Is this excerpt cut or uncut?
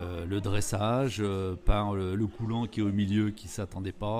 uncut